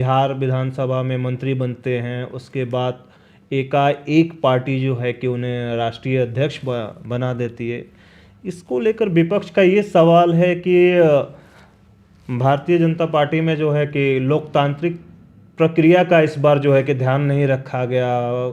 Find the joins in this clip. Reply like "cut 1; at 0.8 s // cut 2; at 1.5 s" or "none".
none